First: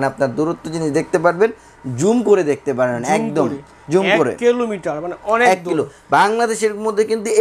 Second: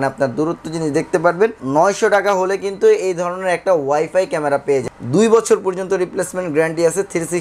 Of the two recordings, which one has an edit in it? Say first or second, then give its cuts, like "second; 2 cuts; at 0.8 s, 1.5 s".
second; 2 cuts; at 1.6 s, 4.8 s